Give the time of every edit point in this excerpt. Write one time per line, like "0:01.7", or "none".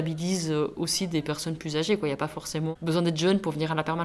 none